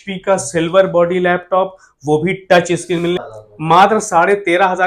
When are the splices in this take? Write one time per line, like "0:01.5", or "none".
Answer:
0:03.2

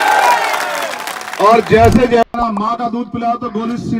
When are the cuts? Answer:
0:02.2

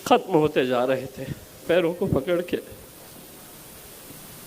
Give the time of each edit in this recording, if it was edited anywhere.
0:01.6

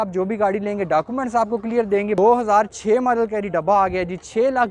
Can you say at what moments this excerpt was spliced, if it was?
0:02.2

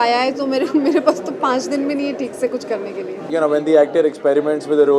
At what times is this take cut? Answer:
0:03.2

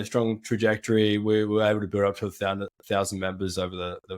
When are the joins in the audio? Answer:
none

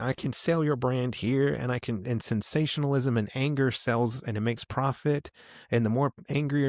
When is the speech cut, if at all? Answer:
none

